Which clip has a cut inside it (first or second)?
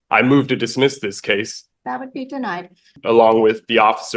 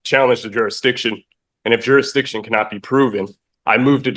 first